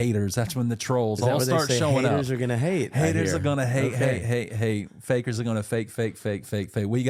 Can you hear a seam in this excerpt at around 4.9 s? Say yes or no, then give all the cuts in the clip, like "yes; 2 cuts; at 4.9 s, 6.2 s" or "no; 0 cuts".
no; 0 cuts